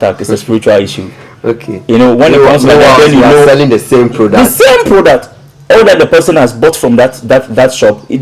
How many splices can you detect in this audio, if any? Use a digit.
0